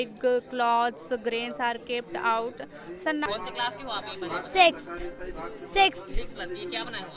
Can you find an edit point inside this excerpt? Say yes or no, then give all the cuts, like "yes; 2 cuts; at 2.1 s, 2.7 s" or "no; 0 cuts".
yes; 1 cut; at 3.3 s